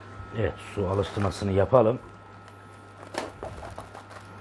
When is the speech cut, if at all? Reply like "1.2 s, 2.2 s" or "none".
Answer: none